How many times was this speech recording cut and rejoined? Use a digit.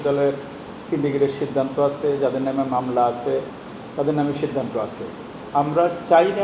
1